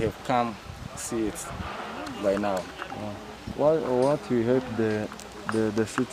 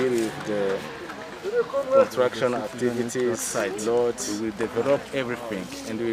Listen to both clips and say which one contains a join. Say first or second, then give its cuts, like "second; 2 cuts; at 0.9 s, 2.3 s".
second; 1 cut; at 4.2 s